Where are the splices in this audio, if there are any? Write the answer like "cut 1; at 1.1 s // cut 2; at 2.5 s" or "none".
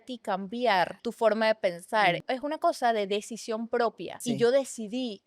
cut 1; at 1.0 s // cut 2; at 2.2 s // cut 3; at 4.2 s